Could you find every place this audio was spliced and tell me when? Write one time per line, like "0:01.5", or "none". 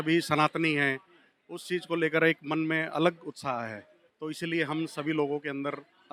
none